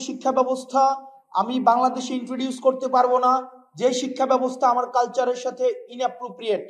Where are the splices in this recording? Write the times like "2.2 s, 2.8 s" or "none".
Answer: none

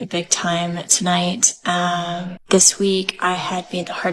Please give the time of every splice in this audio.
2.3 s

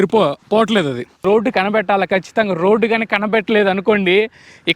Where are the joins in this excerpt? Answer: 1.2 s

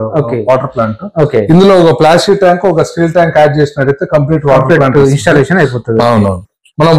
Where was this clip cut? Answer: none

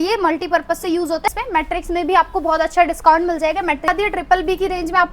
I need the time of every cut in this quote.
1.3 s, 3.9 s

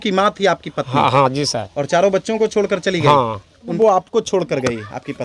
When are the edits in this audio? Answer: 3.7 s

